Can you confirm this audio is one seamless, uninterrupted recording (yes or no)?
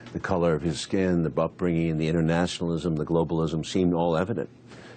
yes